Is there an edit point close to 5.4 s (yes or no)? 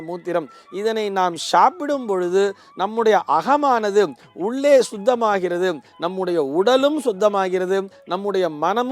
no